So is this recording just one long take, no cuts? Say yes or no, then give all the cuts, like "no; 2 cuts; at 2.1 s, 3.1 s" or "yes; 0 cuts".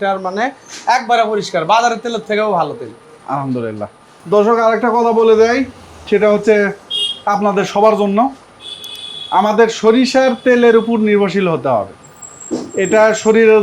yes; 0 cuts